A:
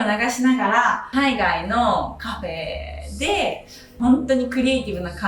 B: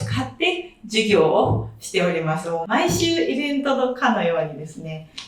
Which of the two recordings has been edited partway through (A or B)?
A